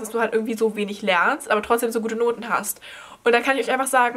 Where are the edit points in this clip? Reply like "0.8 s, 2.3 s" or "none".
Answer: none